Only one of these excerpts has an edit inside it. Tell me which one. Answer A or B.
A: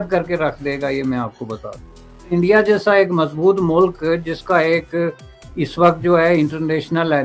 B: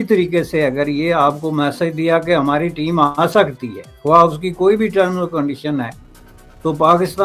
A